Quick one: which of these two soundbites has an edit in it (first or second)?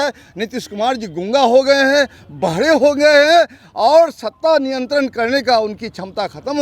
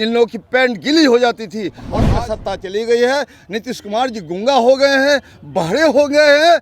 second